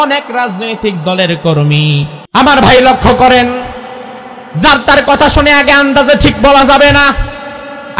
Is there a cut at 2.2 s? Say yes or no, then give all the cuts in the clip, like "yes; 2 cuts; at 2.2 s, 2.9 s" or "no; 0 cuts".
yes; 1 cut; at 2.2 s